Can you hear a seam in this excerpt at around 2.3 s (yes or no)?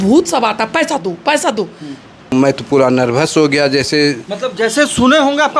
yes